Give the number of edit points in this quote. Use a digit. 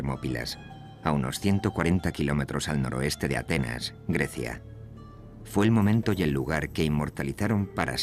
1